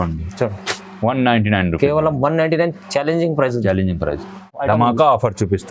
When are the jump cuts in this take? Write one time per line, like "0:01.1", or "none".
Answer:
0:04.6